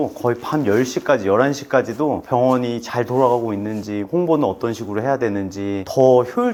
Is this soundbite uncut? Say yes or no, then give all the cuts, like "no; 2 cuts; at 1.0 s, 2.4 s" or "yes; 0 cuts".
yes; 0 cuts